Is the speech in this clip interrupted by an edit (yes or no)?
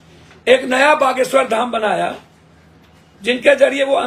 no